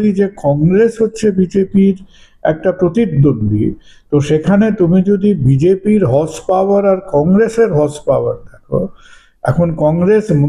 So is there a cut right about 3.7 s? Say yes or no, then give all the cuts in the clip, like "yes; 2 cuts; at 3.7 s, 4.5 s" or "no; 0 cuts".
no; 0 cuts